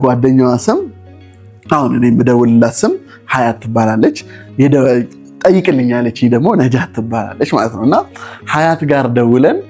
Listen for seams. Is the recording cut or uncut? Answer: uncut